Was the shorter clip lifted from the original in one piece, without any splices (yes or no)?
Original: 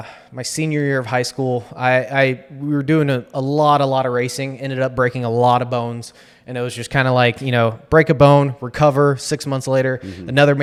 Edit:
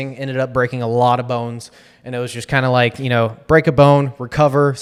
yes